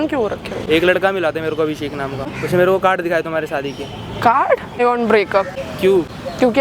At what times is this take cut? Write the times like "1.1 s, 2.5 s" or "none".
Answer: 2.3 s, 4.8 s, 5.6 s